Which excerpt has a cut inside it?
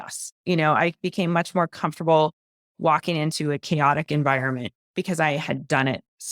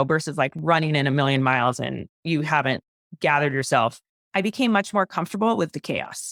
first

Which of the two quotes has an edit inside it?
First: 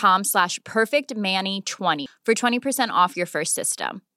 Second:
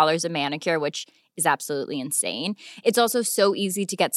first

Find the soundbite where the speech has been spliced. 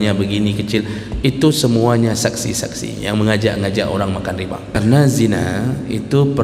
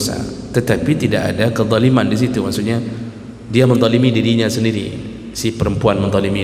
first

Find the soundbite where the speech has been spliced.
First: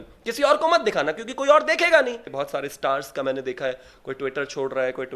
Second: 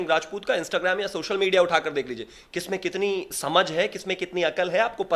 first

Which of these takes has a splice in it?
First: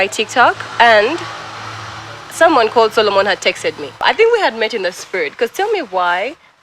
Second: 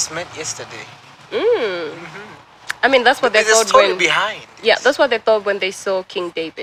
first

